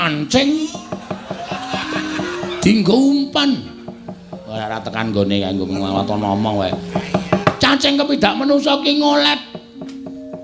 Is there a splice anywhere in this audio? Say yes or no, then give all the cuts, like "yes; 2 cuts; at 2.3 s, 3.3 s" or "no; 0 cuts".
no; 0 cuts